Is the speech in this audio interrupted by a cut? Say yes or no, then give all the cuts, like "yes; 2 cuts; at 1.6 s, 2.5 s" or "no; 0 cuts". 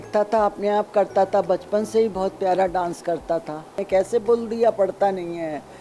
yes; 1 cut; at 3.8 s